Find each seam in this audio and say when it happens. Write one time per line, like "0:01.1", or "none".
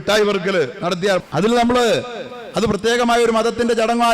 0:01.3